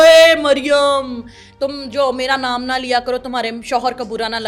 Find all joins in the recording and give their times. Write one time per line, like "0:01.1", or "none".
none